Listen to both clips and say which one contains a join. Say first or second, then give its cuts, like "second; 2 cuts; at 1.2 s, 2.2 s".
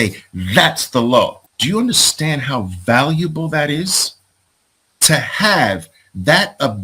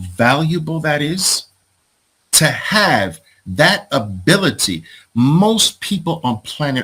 first; 1 cut; at 1.5 s